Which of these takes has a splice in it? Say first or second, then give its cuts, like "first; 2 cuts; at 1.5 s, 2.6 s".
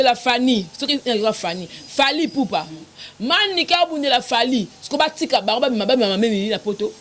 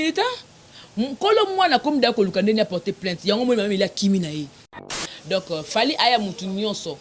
second; 1 cut; at 5.0 s